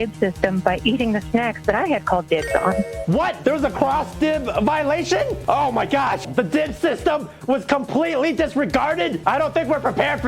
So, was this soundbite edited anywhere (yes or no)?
yes